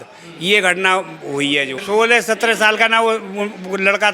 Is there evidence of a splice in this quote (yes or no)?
yes